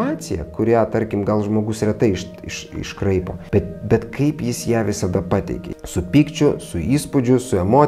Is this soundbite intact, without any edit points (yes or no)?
no